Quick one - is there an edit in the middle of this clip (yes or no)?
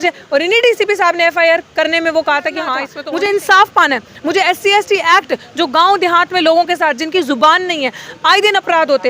yes